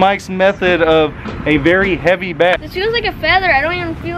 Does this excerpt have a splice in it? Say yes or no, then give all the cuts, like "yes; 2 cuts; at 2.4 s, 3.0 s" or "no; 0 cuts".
yes; 1 cut; at 2.6 s